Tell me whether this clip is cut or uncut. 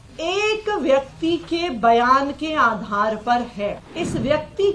cut